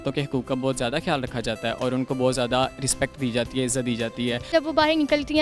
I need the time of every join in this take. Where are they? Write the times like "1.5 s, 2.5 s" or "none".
4.5 s